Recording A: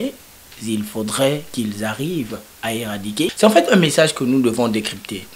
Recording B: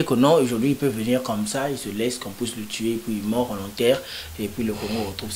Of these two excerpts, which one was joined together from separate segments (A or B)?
A